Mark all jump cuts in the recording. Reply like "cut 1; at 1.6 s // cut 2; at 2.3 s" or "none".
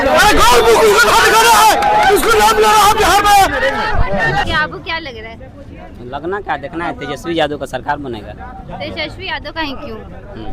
cut 1; at 4.5 s